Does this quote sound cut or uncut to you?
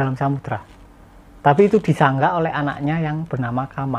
uncut